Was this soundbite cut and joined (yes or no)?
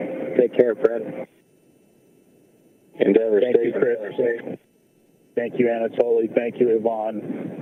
no